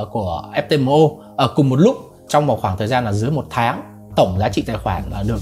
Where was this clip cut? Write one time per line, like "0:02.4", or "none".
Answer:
0:02.2